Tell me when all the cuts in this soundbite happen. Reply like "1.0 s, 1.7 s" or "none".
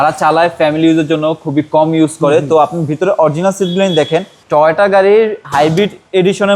4.4 s